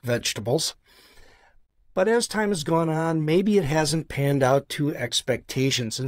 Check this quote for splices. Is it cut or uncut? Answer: uncut